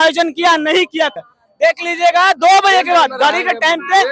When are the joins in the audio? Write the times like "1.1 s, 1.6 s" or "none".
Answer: 1.1 s